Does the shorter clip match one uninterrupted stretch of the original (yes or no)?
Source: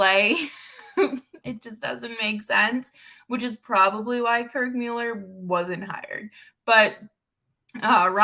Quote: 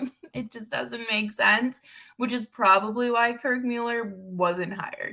yes